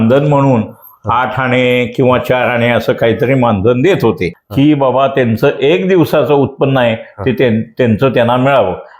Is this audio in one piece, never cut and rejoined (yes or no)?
no